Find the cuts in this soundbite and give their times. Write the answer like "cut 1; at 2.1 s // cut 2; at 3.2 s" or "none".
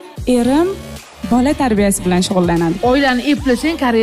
cut 1; at 2.8 s